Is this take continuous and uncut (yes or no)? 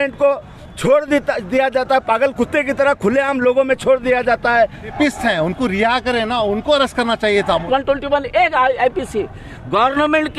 no